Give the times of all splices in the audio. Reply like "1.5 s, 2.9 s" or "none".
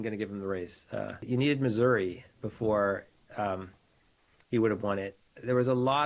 1.2 s